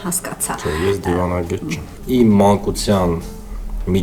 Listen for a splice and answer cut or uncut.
cut